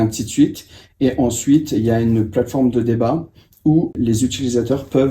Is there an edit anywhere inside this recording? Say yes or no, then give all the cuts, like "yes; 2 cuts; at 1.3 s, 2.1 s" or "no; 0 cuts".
yes; 1 cut; at 3.9 s